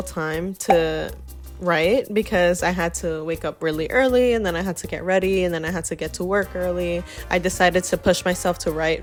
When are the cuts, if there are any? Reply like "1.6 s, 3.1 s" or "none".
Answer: none